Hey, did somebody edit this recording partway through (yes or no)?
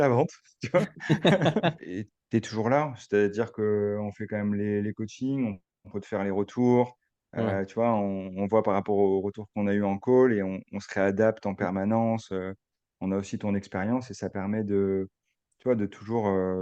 yes